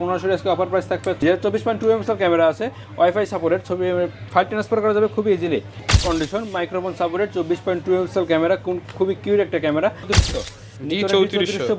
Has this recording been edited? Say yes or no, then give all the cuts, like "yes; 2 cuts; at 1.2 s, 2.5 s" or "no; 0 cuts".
yes; 3 cuts; at 1.2 s, 5.9 s, 10.1 s